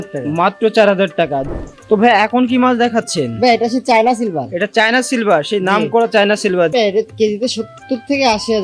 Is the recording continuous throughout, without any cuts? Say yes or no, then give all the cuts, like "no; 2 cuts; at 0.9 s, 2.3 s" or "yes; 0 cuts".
no; 2 cuts; at 1.5 s, 6.7 s